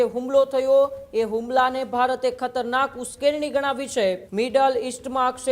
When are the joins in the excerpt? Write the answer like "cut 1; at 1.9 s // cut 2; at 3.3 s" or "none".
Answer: cut 1; at 4.2 s

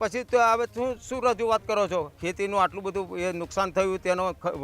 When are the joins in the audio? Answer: cut 1; at 2.2 s

